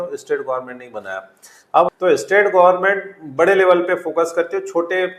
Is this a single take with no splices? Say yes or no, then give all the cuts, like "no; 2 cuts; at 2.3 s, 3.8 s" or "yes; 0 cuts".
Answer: no; 1 cut; at 1.9 s